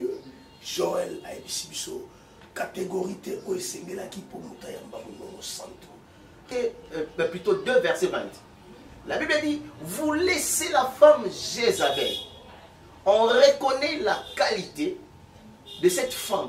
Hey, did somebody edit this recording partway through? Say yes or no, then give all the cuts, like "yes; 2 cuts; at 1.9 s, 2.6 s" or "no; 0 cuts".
yes; 1 cut; at 6.4 s